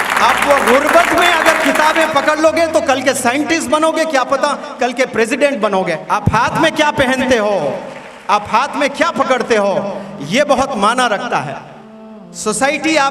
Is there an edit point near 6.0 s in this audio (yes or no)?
yes